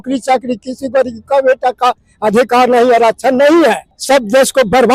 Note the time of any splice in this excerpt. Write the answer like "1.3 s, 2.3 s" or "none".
3.9 s